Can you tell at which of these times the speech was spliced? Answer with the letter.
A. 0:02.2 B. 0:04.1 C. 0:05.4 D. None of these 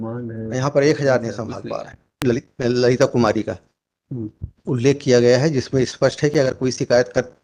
A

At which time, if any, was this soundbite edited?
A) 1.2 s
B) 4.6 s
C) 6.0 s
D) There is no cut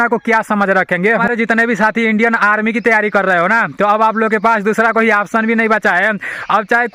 D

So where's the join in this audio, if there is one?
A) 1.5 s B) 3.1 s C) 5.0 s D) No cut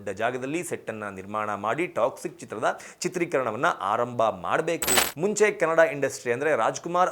C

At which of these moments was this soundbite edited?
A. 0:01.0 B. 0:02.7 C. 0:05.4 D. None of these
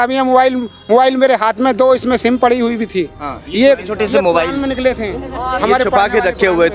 D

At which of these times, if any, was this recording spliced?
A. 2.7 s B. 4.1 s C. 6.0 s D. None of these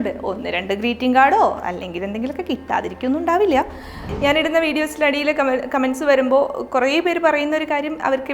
B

